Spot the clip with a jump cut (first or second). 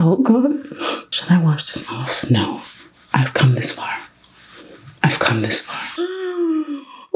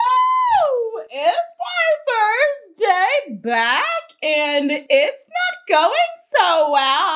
first